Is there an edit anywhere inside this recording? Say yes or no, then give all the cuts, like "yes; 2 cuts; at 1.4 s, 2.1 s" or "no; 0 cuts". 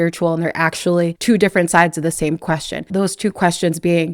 yes; 2 cuts; at 1.2 s, 2.9 s